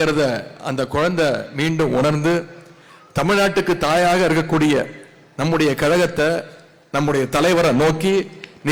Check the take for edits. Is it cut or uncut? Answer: uncut